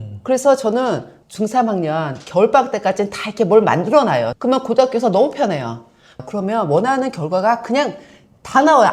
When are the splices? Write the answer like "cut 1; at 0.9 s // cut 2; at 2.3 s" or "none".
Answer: cut 1; at 6.0 s